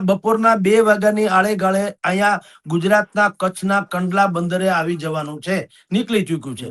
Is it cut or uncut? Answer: uncut